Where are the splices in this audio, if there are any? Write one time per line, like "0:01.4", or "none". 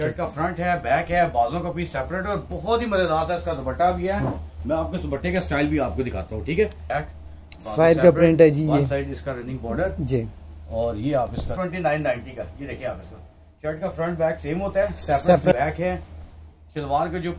0:06.8
0:11.5
0:15.5